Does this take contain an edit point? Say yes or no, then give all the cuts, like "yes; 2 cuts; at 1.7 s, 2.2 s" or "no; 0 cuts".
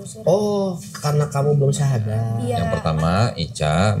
yes; 1 cut; at 2.6 s